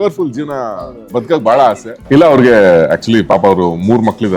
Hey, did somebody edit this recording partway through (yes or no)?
yes